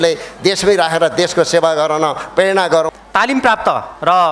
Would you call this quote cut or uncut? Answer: cut